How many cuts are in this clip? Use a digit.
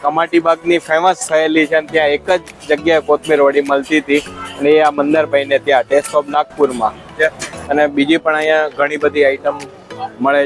1